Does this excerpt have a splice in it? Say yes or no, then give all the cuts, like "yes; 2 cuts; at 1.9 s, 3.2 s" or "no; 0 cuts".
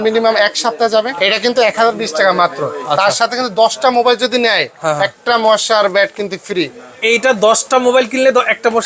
yes; 1 cut; at 1.1 s